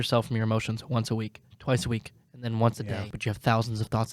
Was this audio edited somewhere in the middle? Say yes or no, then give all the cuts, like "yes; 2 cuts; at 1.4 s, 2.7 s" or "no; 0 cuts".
yes; 2 cuts; at 1.5 s, 3.1 s